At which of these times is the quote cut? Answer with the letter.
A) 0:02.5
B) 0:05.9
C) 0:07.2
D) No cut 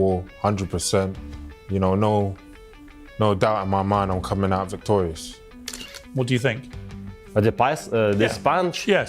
B